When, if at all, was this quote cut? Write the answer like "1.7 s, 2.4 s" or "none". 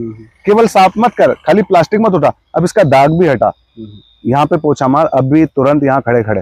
none